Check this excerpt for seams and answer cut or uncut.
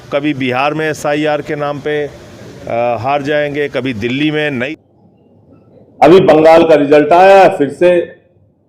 cut